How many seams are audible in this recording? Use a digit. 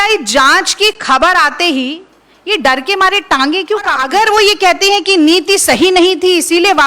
1